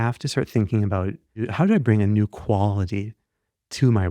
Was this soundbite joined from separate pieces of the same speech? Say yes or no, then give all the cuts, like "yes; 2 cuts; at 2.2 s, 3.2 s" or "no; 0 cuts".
yes; 1 cut; at 1.5 s